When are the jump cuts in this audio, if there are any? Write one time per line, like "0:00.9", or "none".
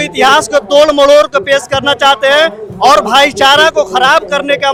none